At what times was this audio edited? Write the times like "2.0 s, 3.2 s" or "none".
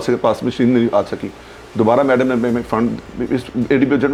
none

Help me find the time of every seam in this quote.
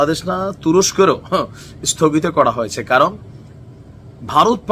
none

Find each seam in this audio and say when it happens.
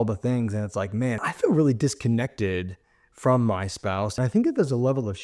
1.3 s, 4.2 s

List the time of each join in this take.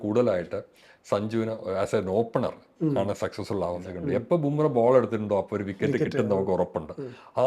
3.9 s

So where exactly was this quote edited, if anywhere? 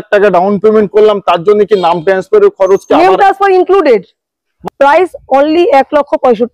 4.6 s

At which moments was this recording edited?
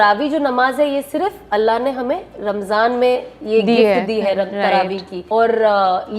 none

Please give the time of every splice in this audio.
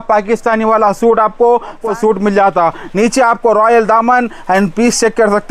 1.8 s

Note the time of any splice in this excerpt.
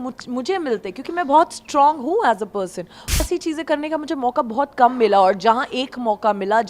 3.2 s

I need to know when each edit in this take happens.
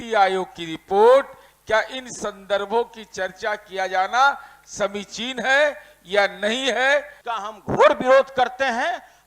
7.2 s

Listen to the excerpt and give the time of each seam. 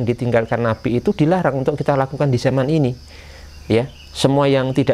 none

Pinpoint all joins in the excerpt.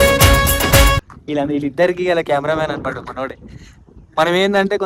none

